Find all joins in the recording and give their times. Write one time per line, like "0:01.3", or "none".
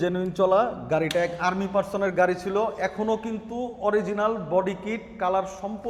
none